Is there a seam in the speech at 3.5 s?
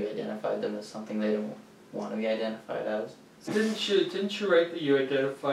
yes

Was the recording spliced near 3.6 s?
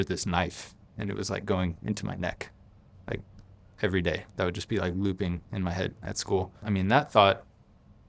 no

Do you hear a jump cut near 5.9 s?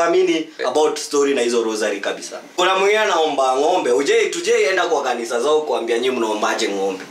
no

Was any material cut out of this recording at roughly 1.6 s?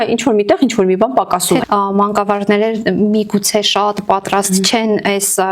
yes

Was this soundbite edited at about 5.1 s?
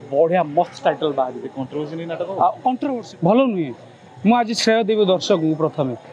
no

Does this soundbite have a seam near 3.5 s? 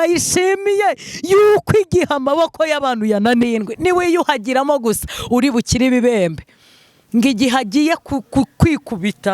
yes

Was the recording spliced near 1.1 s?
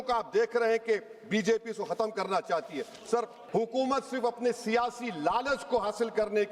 no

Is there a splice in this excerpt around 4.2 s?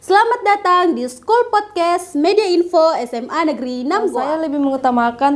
yes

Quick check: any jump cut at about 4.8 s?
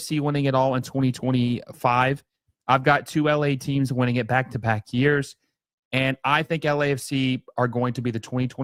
no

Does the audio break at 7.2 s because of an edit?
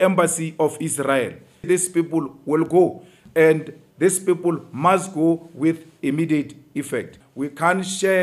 yes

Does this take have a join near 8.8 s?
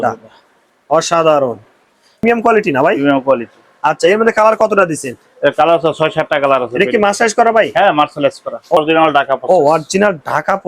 yes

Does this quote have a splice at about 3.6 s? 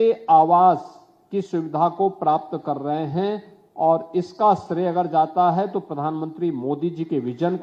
no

